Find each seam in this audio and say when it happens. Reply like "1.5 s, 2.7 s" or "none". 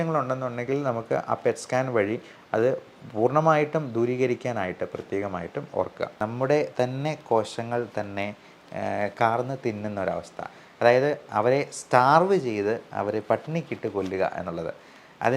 6.1 s